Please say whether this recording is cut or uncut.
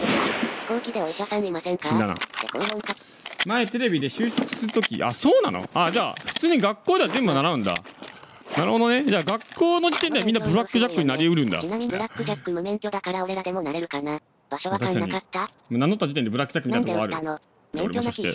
uncut